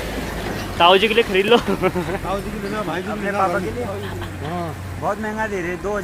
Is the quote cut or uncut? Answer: uncut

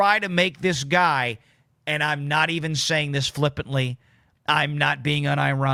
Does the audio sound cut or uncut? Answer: uncut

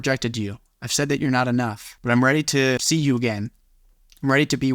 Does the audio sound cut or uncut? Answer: cut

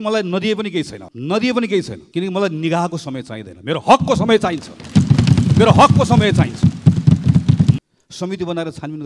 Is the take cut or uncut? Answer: cut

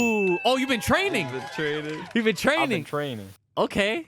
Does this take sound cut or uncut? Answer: uncut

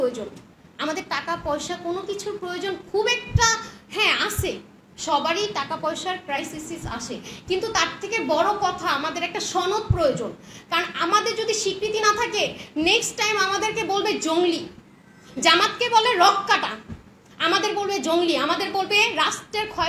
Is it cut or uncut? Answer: uncut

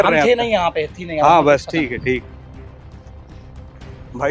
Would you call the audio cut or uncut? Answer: uncut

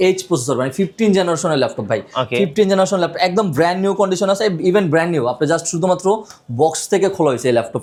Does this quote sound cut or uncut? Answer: uncut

